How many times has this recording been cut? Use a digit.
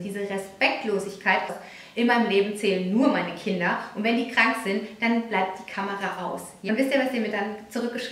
2